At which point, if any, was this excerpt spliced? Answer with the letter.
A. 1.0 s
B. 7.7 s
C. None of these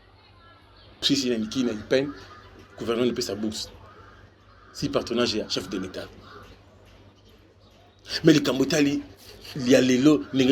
A